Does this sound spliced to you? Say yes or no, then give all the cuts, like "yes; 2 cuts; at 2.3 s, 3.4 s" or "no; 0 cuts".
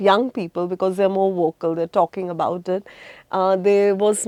no; 0 cuts